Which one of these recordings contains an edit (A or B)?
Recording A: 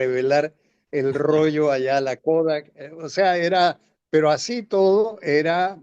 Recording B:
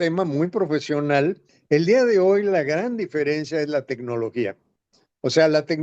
B